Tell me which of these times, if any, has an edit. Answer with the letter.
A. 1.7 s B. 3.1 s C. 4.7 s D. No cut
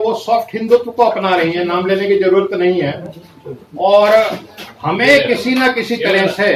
D